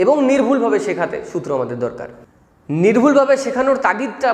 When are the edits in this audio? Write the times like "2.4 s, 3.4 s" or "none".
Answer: 2.6 s